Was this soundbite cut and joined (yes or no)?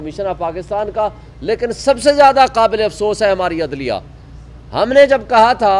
no